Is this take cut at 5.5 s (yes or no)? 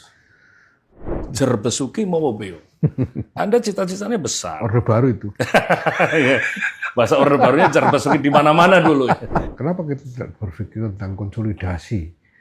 no